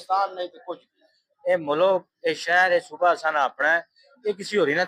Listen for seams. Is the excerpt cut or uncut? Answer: uncut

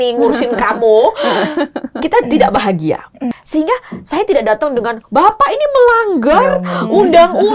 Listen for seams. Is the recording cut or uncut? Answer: cut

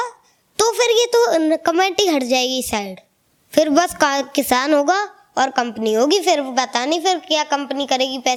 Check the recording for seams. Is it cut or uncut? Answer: uncut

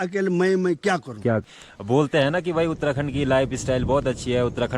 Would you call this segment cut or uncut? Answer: cut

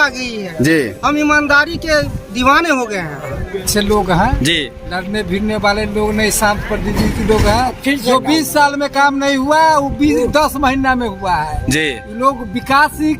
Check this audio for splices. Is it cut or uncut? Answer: cut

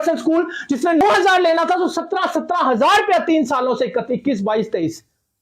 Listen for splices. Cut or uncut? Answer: cut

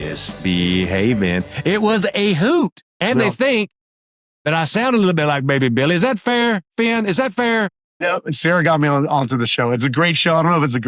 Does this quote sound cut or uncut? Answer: cut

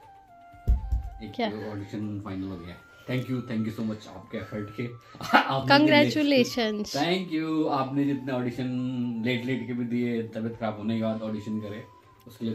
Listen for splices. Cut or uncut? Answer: uncut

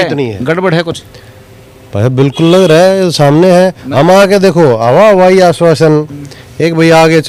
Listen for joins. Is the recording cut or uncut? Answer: uncut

